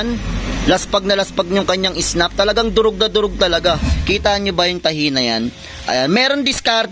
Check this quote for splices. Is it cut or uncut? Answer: cut